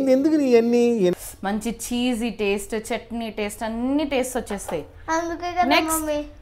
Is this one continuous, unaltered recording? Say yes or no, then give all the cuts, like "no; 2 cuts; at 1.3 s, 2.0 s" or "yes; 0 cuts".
no; 1 cut; at 1.3 s